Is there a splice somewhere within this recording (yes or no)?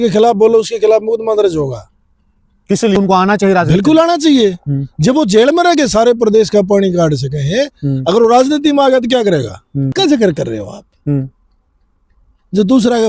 yes